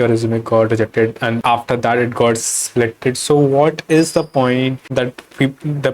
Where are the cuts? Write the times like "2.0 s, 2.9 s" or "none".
1.4 s, 4.8 s